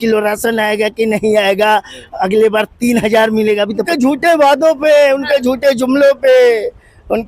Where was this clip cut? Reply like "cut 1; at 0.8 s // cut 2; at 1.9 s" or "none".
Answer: cut 1; at 3.9 s